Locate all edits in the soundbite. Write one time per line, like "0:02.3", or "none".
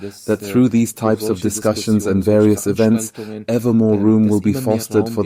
none